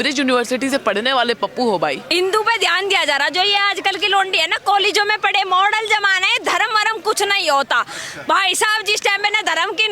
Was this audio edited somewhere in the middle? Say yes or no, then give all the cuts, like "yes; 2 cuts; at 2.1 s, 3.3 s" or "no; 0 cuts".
yes; 1 cut; at 2.0 s